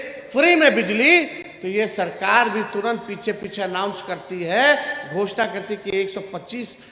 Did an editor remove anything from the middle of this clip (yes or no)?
no